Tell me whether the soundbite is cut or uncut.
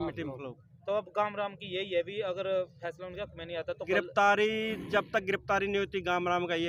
uncut